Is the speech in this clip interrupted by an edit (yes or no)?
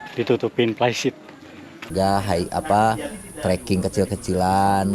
yes